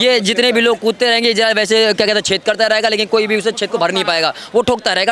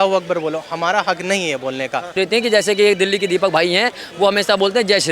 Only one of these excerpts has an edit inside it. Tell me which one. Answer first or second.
second